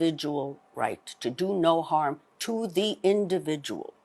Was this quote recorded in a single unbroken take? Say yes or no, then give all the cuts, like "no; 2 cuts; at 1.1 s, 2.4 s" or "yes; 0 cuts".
yes; 0 cuts